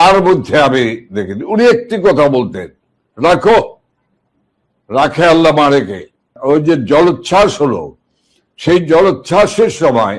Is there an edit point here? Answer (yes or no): yes